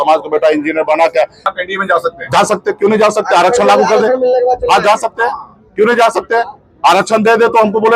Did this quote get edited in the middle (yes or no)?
yes